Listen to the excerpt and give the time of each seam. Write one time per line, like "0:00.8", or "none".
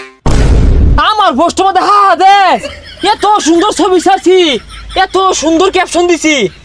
0:00.9